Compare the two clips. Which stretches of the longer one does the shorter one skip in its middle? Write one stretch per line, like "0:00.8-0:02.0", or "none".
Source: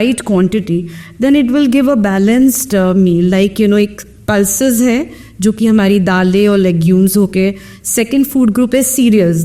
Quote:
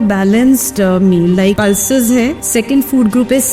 0:03.5-0:04.3
0:05.1-0:07.8